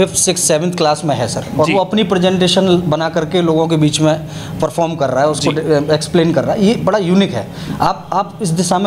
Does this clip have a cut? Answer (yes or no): no